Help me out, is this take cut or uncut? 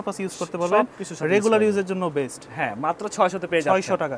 uncut